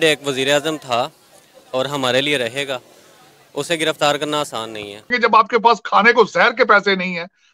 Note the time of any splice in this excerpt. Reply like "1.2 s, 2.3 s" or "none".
5.1 s